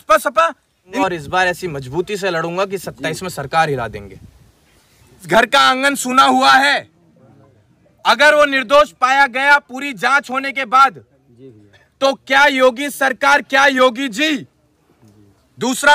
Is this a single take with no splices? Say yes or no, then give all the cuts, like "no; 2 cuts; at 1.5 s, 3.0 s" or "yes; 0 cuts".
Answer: no; 2 cuts; at 1.0 s, 5.2 s